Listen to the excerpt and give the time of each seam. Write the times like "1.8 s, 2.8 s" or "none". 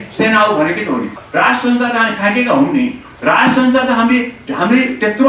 1.2 s